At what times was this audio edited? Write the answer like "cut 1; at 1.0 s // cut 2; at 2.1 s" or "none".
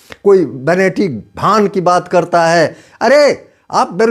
none